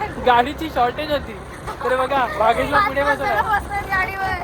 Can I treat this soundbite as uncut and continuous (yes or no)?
yes